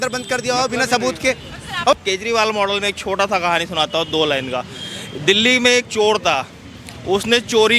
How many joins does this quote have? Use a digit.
1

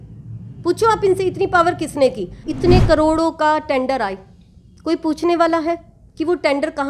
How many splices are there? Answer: 1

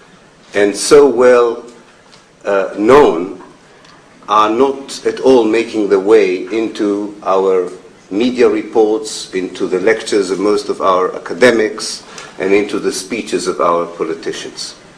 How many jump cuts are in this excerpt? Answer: 1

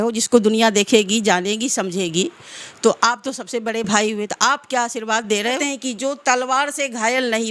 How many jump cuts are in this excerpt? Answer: 1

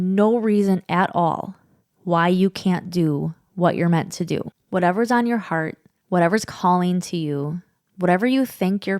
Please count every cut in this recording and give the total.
1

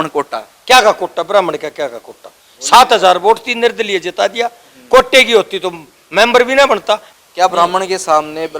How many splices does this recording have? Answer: 1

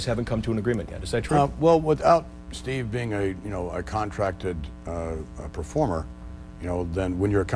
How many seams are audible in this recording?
0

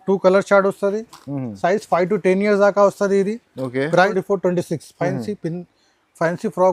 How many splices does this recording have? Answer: 1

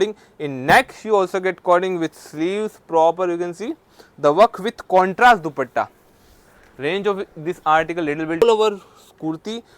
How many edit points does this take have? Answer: 1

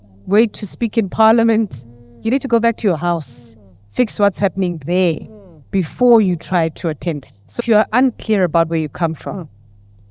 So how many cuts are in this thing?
1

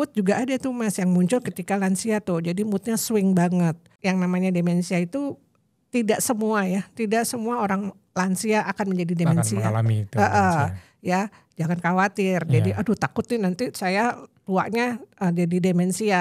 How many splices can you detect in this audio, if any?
1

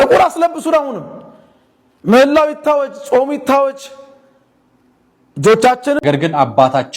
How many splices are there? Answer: 1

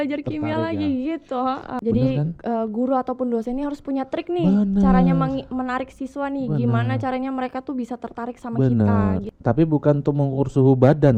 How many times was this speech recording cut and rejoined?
2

